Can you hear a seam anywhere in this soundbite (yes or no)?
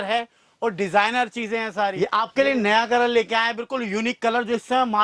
yes